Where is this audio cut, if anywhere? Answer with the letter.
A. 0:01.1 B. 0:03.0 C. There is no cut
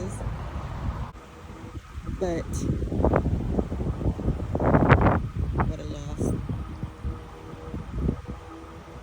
A